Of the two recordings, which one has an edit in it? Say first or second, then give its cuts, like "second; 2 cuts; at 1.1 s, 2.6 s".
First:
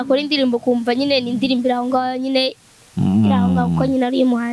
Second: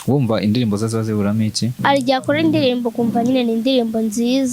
second; 1 cut; at 1.8 s